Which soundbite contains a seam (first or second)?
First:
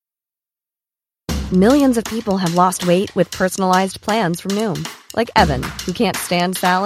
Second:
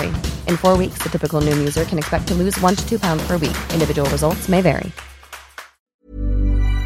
second